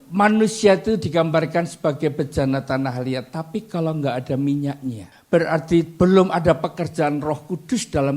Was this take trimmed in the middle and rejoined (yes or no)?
yes